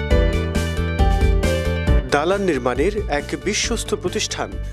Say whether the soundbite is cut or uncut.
uncut